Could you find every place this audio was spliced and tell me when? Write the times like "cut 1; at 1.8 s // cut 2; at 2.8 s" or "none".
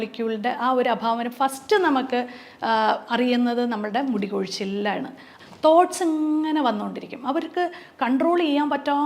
cut 1; at 5.2 s